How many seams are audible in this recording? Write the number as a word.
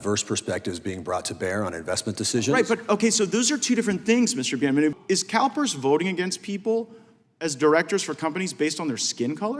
one